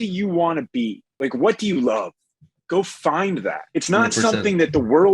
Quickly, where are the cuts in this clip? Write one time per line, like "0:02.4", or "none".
0:01.2
0:03.6